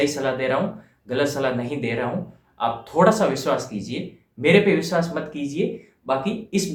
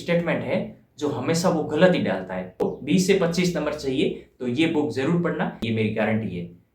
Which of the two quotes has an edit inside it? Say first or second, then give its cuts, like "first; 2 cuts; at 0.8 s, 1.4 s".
second; 2 cuts; at 2.6 s, 5.6 s